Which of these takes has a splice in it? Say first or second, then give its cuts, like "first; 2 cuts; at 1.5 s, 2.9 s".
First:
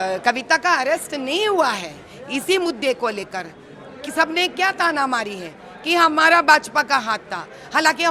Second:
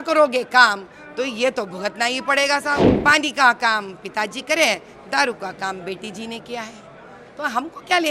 second; 1 cut; at 2.9 s